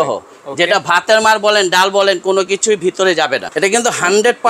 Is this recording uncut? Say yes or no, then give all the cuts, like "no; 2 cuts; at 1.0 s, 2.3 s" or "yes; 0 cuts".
no; 1 cut; at 3.5 s